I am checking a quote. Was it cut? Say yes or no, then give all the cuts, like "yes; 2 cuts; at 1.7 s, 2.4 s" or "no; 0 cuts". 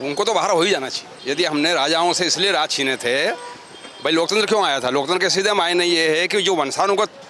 yes; 1 cut; at 1.1 s